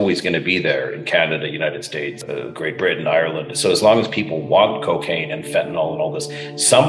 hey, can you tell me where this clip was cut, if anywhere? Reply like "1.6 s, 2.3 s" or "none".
2.2 s

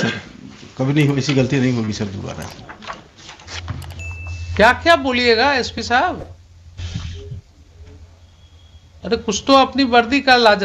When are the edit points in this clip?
3.6 s

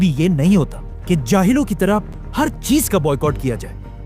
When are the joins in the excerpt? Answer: 2.2 s

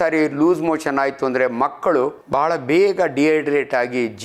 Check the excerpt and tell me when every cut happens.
2.2 s

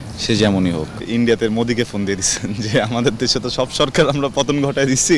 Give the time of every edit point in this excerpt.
1.0 s

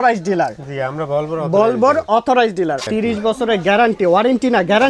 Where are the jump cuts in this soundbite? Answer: 2.8 s

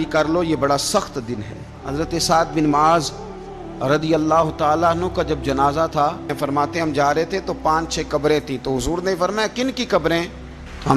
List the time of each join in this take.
1.8 s, 6.3 s

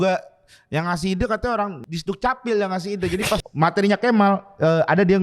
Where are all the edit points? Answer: 1.8 s, 3.5 s

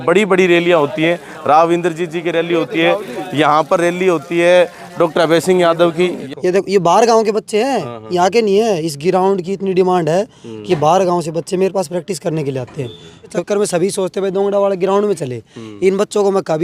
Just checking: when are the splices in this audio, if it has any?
6.2 s, 13.4 s

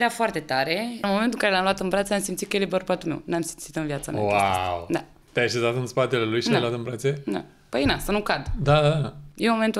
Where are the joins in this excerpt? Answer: 1.0 s, 5.2 s

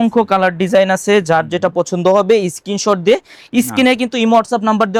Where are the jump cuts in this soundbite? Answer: none

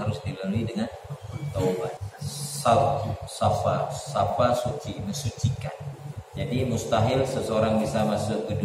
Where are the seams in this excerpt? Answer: 2.1 s, 6.0 s

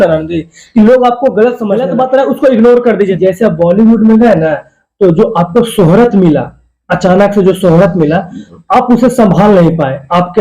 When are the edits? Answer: 1.9 s, 3.1 s

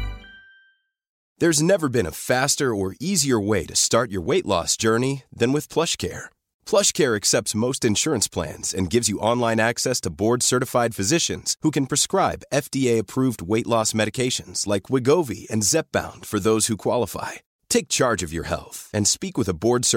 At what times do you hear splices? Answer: 1.2 s

